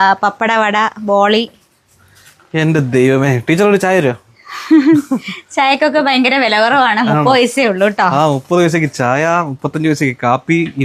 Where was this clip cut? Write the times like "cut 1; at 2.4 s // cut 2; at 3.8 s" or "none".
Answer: none